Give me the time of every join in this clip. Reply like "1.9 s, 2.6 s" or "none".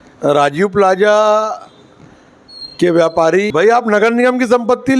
3.5 s